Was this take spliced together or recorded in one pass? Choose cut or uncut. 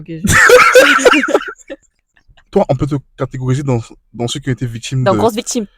cut